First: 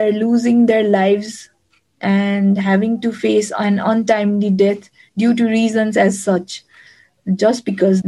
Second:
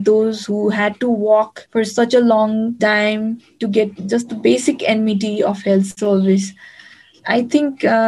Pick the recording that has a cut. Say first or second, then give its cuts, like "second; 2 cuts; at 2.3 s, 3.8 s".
second; 2 cuts; at 1.6 s, 4.0 s